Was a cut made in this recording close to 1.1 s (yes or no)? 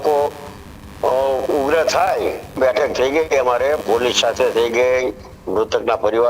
no